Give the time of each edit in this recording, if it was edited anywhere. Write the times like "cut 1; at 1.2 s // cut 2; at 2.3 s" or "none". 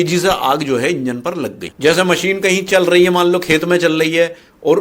cut 1; at 1.6 s